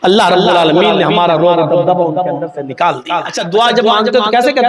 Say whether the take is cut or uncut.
cut